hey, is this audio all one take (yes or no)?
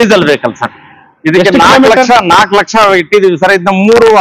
yes